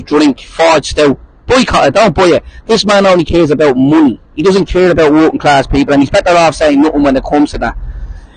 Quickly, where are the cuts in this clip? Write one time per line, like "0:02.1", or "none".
0:06.2